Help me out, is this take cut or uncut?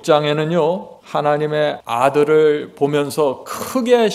cut